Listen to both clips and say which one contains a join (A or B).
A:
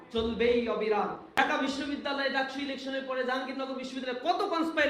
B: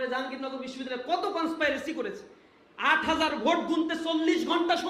A